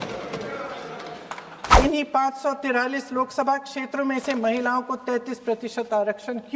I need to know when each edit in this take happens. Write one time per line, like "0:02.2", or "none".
0:01.6